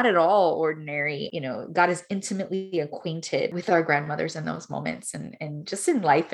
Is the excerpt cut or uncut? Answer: cut